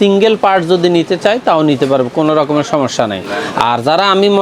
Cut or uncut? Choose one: uncut